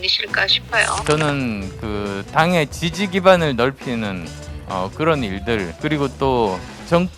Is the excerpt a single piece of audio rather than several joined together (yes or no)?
no